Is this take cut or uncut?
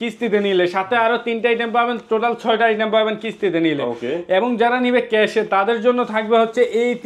uncut